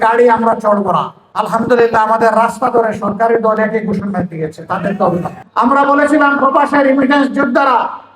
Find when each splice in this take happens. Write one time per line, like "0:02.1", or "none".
0:01.2